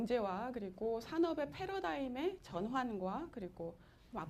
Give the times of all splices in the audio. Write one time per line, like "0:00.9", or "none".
none